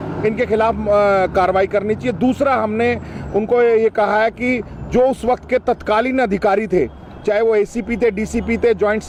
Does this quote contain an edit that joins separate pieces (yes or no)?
no